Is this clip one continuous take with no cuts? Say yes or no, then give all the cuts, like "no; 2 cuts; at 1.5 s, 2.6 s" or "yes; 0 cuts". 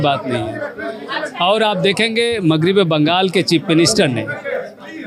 yes; 0 cuts